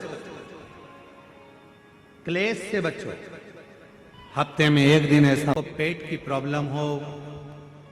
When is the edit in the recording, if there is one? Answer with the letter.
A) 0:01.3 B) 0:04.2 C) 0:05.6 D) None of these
C